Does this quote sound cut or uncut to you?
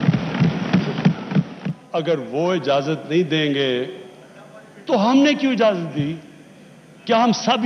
cut